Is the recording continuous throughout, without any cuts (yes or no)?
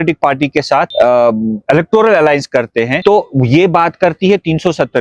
no